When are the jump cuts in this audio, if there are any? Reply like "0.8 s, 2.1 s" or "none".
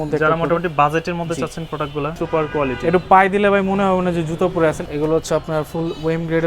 2.1 s, 4.8 s